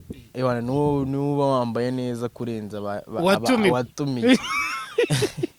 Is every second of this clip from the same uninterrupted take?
yes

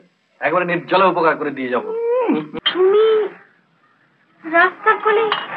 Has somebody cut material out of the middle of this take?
yes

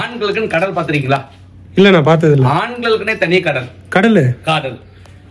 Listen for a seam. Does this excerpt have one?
no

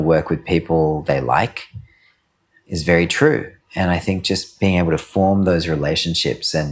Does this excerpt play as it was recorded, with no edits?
yes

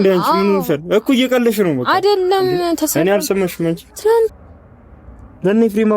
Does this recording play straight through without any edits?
no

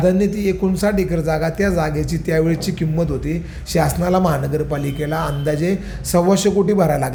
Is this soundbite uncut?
yes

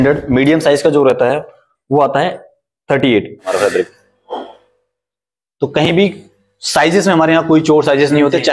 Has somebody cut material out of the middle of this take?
yes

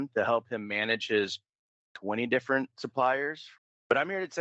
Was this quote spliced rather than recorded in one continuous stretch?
yes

